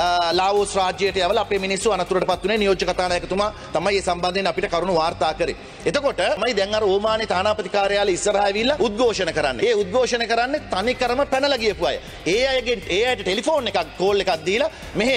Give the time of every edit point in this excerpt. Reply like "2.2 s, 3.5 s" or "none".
6.4 s, 8.8 s, 9.5 s